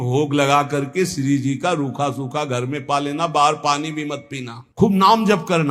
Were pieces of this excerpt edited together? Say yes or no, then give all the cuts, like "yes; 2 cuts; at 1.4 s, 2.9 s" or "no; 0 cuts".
yes; 1 cut; at 4.6 s